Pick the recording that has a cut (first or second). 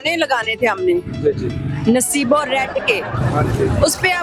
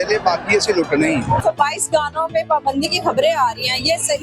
second